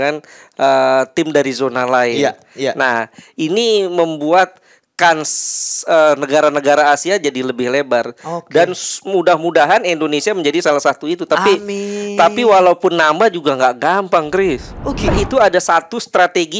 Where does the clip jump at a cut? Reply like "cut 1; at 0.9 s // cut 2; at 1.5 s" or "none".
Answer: cut 1; at 15.1 s